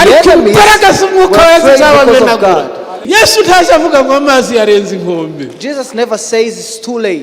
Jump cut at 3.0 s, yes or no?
yes